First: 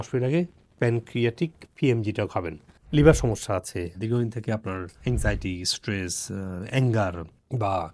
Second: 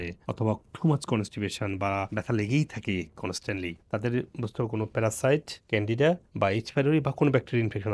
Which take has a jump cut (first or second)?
first